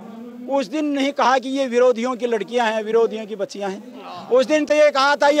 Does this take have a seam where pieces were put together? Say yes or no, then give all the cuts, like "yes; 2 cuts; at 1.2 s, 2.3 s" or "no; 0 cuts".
no; 0 cuts